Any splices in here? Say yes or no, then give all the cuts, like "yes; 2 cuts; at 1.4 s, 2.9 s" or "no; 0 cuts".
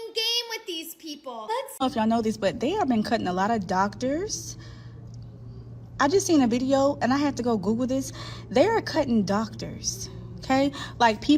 yes; 1 cut; at 1.8 s